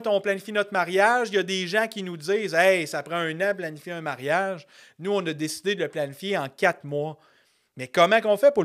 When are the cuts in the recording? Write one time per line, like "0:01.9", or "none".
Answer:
none